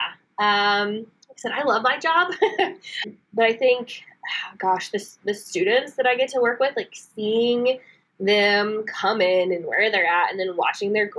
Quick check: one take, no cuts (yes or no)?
no